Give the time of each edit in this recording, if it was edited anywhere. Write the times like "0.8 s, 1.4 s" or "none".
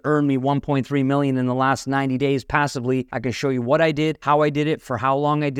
3.1 s, 4.2 s